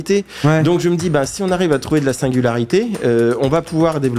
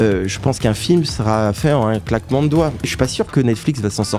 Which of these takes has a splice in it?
second; 1 cut; at 2.9 s

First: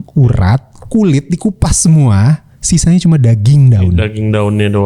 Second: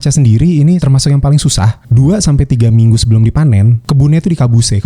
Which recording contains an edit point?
second; 3 cuts; at 0.8 s, 1.8 s, 3.8 s

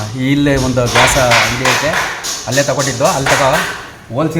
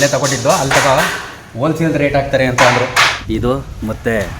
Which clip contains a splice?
second; 1 cut; at 3.2 s

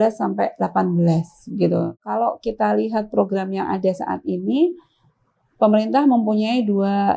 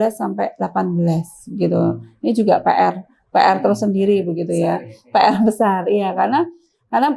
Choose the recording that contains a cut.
first; 1 cut; at 2.0 s

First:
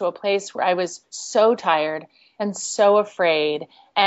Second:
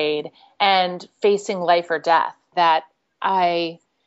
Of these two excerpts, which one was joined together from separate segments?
second; 1 cut; at 2.5 s

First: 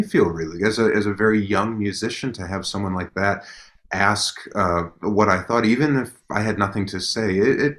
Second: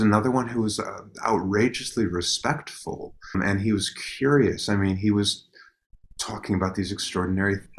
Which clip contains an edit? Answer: second; 1 cut; at 3.3 s

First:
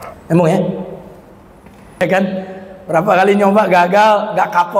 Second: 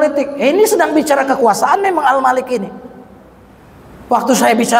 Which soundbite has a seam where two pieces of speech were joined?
first; 1 cut; at 2.0 s

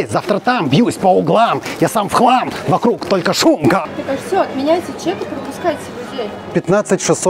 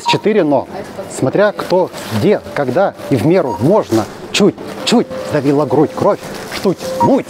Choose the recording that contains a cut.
first; 1 cut; at 3.9 s

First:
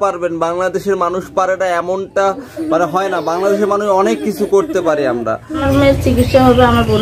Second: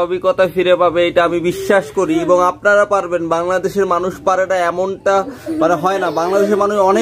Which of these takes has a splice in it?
first; 1 cut; at 5.5 s

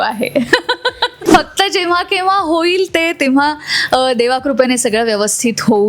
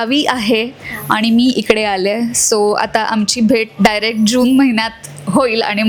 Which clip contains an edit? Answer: first; 1 cut; at 1.2 s

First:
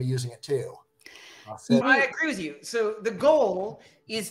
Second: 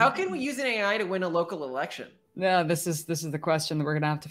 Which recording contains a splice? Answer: first; 1 cut; at 1.8 s

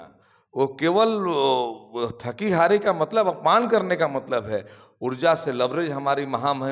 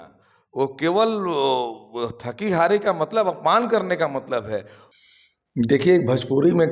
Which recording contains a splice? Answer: second; 1 cut; at 4.8 s

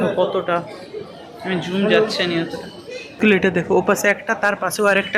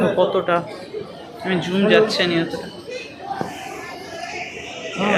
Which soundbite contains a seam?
first; 1 cut; at 3.2 s

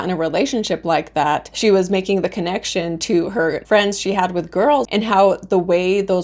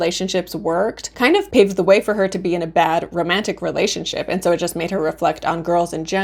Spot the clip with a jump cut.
first; 2 cuts; at 3.6 s, 4.9 s

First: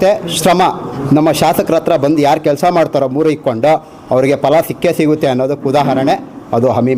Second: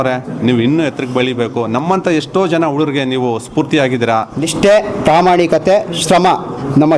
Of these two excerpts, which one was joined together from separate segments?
second; 1 cut; at 4.4 s

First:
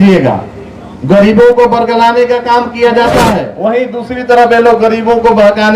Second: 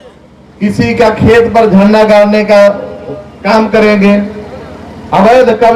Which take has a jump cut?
first; 1 cut; at 3.5 s

